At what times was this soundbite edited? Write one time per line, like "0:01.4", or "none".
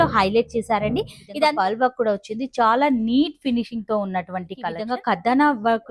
0:01.2
0:04.8